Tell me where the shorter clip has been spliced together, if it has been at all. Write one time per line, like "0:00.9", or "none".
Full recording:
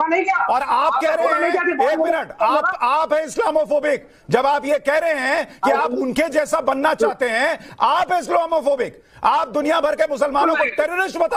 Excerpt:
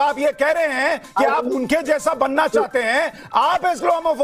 none